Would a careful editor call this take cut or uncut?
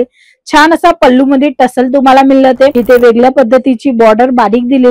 cut